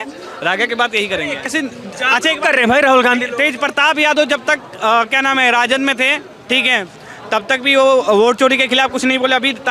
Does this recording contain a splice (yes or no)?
yes